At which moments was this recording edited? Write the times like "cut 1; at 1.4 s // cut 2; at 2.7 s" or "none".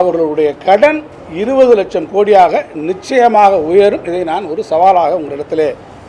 none